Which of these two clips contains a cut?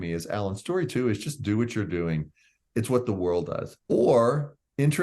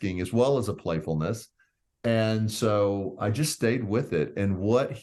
first; 1 cut; at 3.7 s

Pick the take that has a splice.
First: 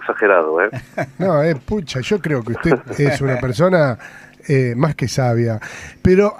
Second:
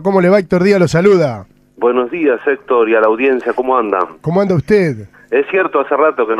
second; 1 cut; at 5.2 s

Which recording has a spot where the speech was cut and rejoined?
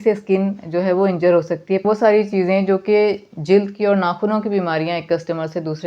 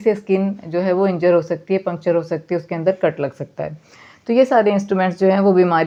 first; 1 cut; at 1.8 s

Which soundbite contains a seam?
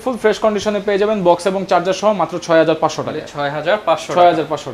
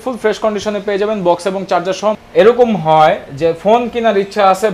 second; 1 cut; at 2.2 s

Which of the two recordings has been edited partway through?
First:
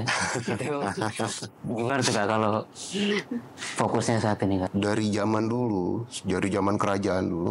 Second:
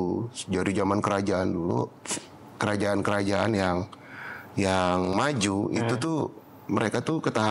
first; 1 cut; at 4.7 s

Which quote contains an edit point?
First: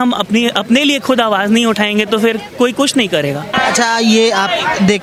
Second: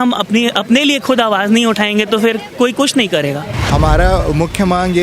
second; 1 cut; at 3.4 s

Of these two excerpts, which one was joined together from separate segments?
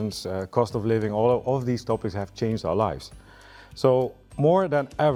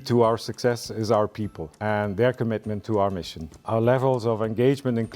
second; 2 cuts; at 1.8 s, 3.6 s

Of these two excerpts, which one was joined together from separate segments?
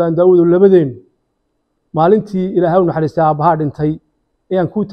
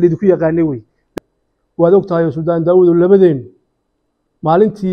second; 1 cut; at 1.1 s

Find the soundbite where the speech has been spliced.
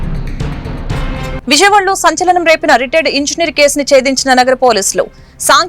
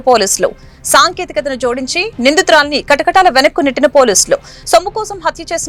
first; 1 cut; at 1.4 s

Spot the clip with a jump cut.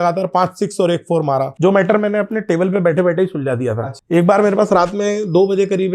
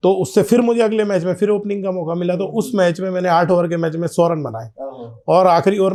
first; 1 cut; at 1.5 s

